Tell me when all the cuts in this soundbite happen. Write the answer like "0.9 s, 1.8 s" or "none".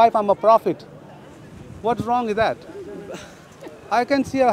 none